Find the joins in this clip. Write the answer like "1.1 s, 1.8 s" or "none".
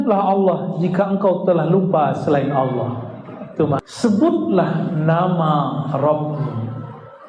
3.8 s